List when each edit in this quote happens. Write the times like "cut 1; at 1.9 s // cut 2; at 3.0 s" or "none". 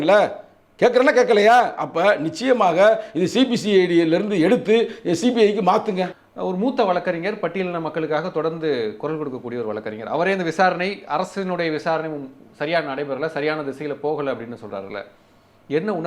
cut 1; at 6.2 s